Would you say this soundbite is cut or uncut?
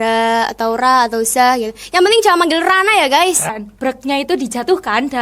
cut